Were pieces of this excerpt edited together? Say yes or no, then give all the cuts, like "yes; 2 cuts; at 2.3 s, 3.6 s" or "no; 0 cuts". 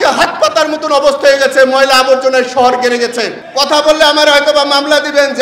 yes; 1 cut; at 3.4 s